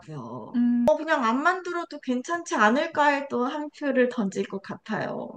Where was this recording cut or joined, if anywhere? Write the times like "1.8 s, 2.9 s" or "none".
none